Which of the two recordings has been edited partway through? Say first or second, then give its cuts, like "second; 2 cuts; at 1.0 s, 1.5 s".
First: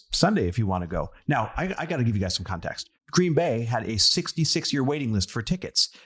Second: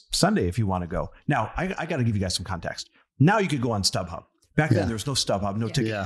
first; 1 cut; at 2.9 s